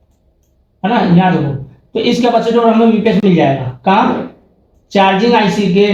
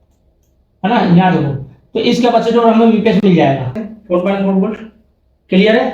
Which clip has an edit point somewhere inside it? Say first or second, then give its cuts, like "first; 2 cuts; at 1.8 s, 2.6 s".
second; 1 cut; at 3.7 s